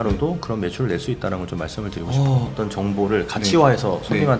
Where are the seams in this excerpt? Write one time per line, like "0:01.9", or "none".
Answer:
0:02.5